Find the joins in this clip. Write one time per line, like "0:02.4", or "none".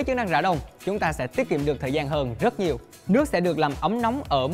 0:02.9